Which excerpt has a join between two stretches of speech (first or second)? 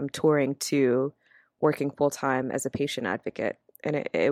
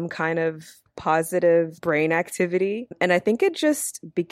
second